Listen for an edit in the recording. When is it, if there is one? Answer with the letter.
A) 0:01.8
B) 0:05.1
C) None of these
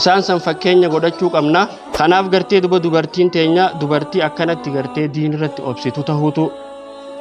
A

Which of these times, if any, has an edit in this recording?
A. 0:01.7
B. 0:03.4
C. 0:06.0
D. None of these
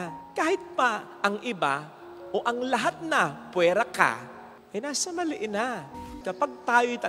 C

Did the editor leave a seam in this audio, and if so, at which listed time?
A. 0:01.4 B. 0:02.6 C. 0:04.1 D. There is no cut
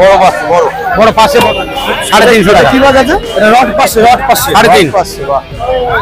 A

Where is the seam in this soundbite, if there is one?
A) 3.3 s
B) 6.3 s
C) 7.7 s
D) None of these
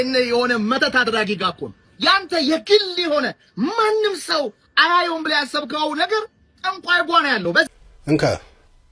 C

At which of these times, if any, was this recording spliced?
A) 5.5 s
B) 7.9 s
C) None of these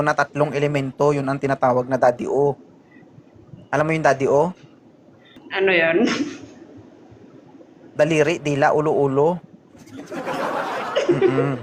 A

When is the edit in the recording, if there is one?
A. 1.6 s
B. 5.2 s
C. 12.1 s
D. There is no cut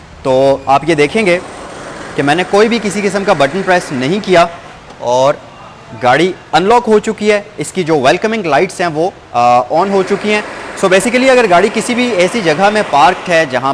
D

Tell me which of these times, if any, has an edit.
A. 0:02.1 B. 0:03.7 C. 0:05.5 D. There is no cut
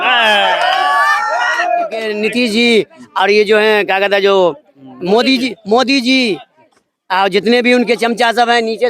A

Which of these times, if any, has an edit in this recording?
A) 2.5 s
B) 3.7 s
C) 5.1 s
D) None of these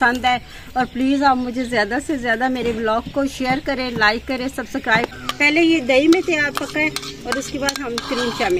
C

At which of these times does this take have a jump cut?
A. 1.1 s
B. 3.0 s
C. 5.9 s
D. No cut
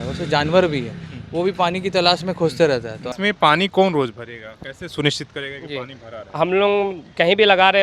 B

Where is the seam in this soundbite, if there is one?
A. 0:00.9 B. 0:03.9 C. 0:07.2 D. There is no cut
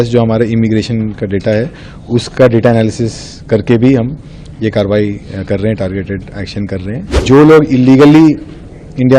C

